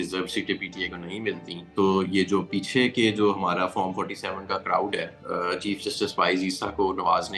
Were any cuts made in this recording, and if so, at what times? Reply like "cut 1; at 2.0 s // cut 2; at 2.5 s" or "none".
none